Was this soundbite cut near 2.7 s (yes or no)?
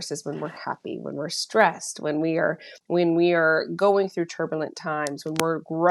yes